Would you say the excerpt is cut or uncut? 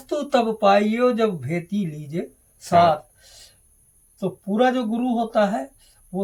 uncut